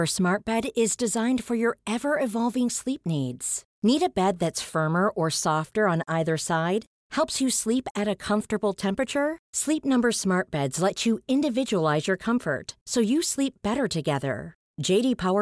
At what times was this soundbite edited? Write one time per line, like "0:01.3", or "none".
none